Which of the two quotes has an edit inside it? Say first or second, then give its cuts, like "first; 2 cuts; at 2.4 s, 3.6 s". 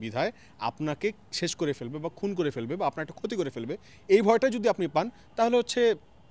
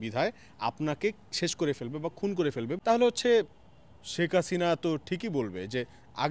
second; 1 cut; at 2.7 s